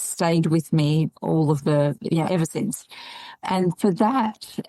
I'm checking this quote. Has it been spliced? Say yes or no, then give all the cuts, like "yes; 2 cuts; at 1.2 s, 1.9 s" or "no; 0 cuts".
yes; 1 cut; at 3.4 s